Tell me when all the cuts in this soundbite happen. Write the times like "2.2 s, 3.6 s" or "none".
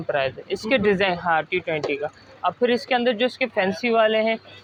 none